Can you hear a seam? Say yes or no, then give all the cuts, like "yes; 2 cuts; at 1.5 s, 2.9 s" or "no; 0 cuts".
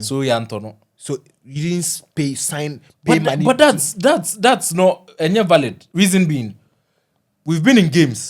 yes; 1 cut; at 5.8 s